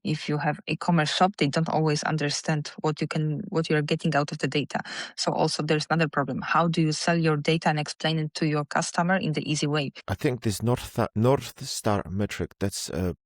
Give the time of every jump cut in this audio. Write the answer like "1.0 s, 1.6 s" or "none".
10.0 s